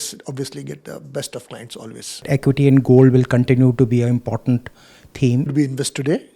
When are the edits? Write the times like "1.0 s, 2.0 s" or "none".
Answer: 2.2 s, 5.5 s